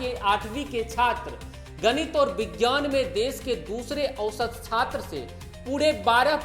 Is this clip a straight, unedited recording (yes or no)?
yes